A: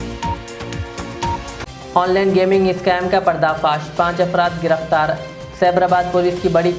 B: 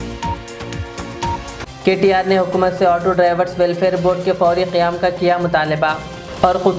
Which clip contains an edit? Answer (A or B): A